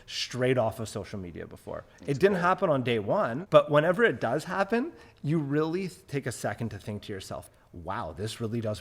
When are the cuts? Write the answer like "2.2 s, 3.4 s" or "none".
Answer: 3.4 s, 7.5 s